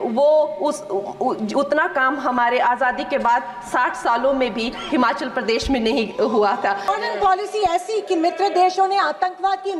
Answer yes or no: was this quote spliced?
yes